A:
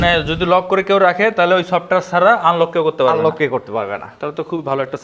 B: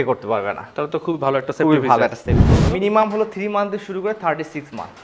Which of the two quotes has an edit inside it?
B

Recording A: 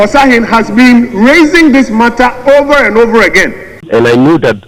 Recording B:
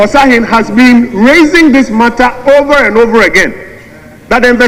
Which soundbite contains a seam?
A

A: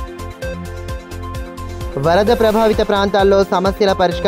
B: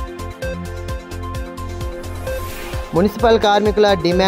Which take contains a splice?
B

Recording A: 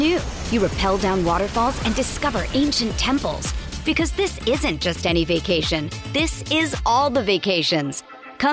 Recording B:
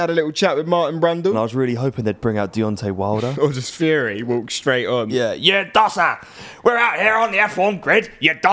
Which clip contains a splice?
B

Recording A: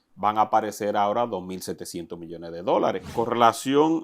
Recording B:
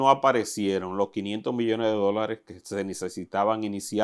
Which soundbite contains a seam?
A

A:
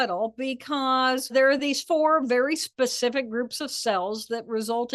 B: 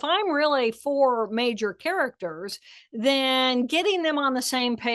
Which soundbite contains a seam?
A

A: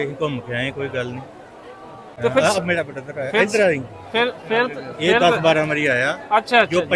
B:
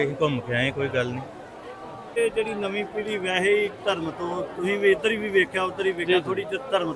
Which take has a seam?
B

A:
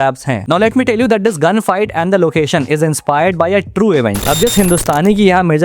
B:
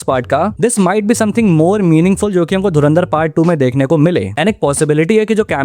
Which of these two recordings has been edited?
A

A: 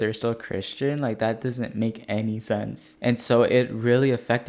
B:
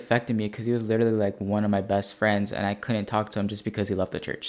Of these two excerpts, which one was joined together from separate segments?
A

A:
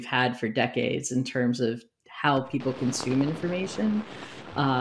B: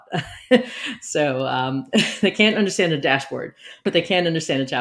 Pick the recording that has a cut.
B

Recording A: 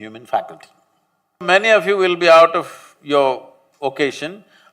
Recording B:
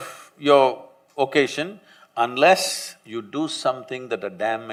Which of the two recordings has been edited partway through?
A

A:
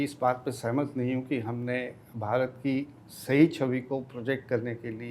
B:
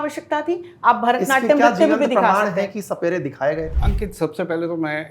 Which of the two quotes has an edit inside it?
B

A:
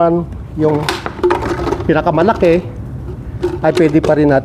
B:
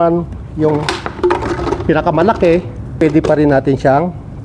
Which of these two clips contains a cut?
B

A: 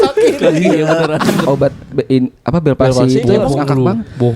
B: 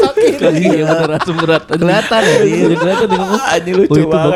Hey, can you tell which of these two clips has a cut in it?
A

